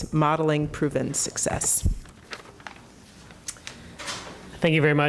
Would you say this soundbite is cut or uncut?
cut